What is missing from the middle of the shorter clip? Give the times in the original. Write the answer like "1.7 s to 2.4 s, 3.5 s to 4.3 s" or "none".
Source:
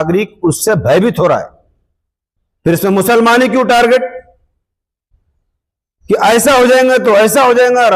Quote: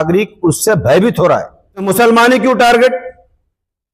1.8 s to 2.9 s